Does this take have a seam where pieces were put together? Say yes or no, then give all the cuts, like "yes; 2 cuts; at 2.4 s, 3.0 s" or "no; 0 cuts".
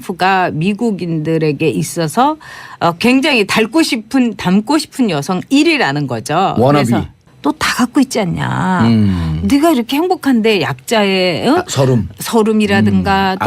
yes; 1 cut; at 7.3 s